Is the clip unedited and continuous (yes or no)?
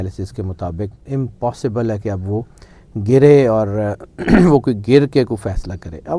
no